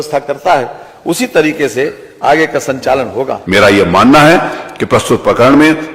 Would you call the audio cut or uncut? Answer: cut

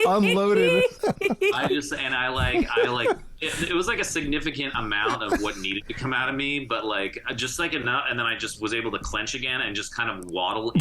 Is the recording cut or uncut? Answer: uncut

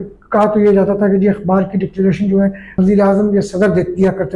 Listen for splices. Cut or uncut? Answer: cut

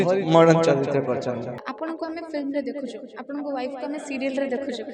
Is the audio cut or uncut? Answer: cut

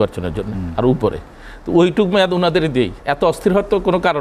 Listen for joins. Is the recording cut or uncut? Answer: cut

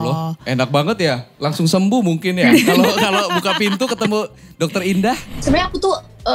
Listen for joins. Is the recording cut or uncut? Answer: cut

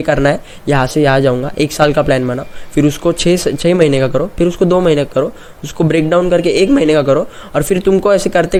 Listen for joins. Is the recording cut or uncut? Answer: uncut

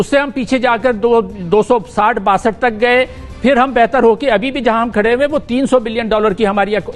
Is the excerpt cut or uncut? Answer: uncut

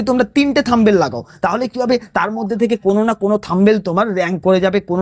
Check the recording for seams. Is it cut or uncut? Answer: uncut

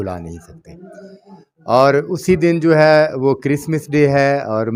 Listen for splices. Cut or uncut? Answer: uncut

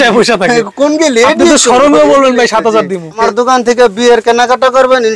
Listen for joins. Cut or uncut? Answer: cut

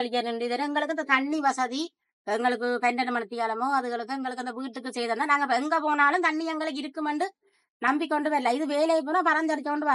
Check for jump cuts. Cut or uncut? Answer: uncut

